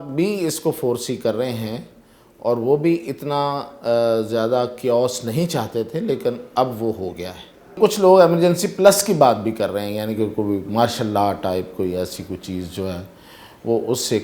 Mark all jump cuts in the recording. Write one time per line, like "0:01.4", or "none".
0:07.8